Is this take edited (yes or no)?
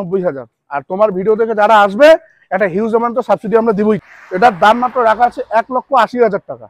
yes